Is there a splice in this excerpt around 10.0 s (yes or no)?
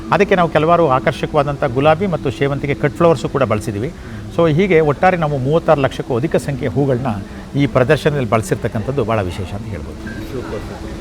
no